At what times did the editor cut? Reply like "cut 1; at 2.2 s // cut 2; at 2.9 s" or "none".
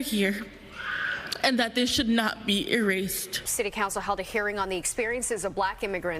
cut 1; at 3.4 s